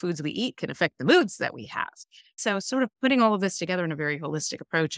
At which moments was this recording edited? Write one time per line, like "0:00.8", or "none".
0:02.4